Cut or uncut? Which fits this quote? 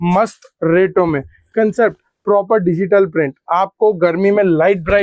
uncut